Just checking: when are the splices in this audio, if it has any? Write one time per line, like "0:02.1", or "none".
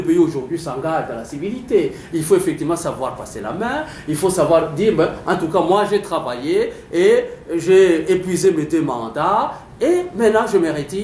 none